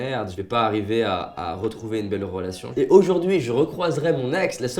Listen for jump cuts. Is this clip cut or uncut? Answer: cut